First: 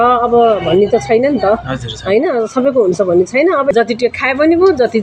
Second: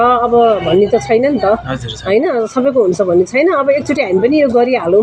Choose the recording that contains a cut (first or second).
first